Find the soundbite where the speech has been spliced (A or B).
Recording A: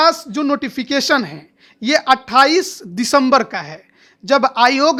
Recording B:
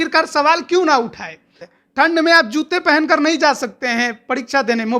B